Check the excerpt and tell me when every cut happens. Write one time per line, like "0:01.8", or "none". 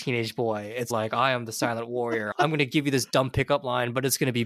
none